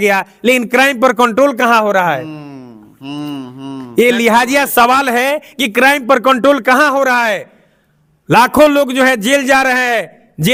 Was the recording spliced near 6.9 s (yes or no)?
no